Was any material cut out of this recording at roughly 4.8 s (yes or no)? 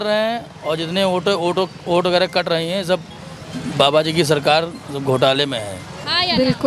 no